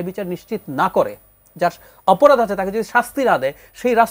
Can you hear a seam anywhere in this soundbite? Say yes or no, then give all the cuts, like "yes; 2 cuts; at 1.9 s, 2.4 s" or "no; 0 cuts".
no; 0 cuts